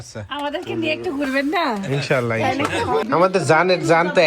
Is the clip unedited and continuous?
no; 1 cut; at 3.0 s

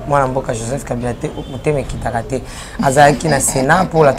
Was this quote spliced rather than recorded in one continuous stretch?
no; 0 cuts

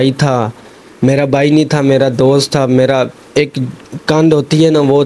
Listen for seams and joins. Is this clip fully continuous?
yes; 0 cuts

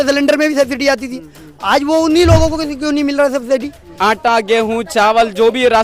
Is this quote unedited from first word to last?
no; 1 cut; at 3.8 s

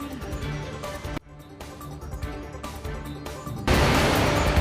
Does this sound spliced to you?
yes; 1 cut; at 3.5 s

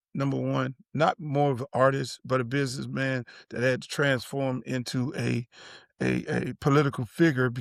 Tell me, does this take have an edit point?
no; 0 cuts

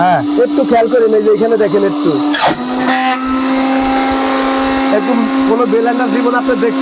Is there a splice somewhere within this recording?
no; 0 cuts

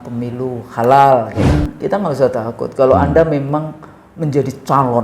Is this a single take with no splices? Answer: no; 1 cut; at 1.5 s

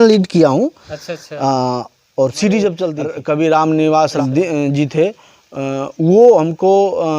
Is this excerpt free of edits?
no; 2 cuts; at 3.1 s, 4.1 s

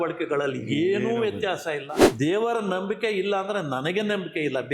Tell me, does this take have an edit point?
yes; 1 cut; at 2.0 s

